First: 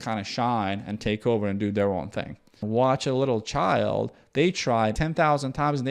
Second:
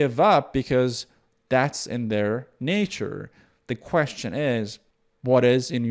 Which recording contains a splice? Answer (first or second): first